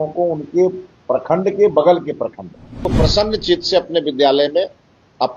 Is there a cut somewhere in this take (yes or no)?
yes